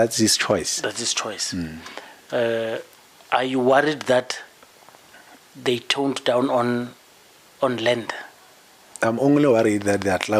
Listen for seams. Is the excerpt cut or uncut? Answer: uncut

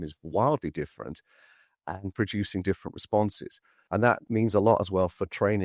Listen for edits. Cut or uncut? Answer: cut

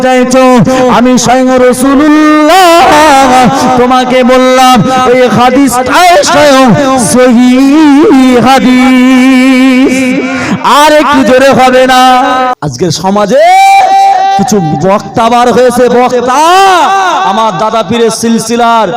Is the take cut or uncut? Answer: cut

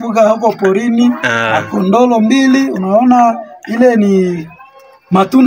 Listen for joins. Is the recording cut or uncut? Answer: uncut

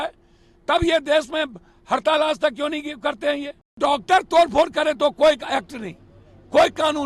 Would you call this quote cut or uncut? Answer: cut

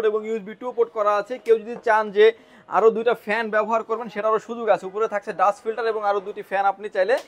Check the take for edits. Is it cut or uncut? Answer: uncut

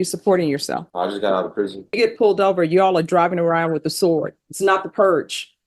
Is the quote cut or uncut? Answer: cut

